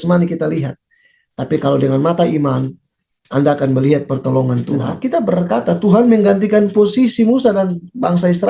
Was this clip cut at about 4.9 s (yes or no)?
yes